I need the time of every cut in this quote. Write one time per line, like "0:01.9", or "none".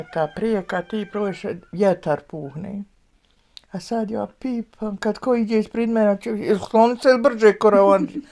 none